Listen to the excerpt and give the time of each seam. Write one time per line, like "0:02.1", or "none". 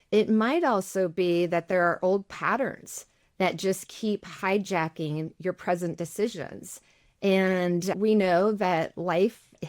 0:07.9